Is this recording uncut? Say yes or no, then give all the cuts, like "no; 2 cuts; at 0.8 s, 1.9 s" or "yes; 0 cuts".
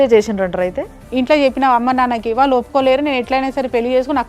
no; 1 cut; at 1.0 s